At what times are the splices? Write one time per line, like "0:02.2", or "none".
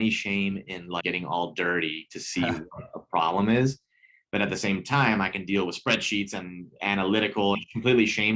0:01.0
0:07.6